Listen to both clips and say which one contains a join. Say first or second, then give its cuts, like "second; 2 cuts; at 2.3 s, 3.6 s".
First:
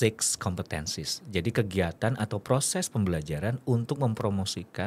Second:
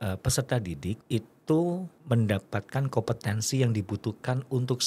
second; 2 cuts; at 1.0 s, 1.9 s